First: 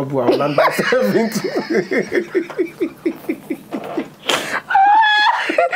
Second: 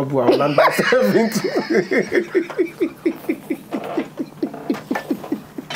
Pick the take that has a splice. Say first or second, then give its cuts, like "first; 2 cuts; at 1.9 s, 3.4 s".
first; 1 cut; at 4.1 s